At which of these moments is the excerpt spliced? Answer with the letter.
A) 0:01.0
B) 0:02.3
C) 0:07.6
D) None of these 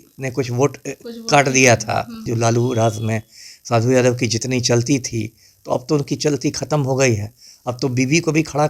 B